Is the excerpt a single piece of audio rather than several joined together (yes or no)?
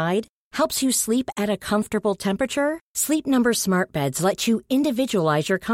yes